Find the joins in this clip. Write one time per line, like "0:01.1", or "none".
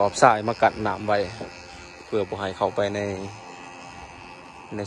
none